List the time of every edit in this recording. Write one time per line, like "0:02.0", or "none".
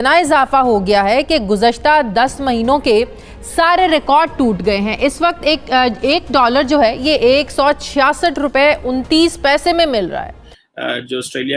0:10.3